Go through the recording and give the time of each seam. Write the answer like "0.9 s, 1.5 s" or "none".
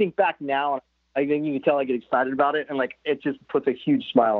none